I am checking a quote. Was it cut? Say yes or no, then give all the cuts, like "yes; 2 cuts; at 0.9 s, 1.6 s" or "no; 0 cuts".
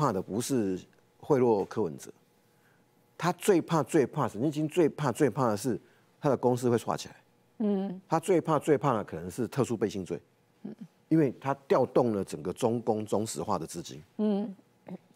no; 0 cuts